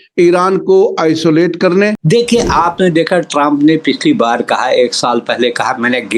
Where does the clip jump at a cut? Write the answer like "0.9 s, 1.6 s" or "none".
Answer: 2.0 s